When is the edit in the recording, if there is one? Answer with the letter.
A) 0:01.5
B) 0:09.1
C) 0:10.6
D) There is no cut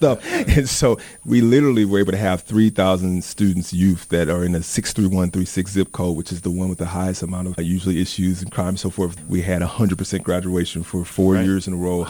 B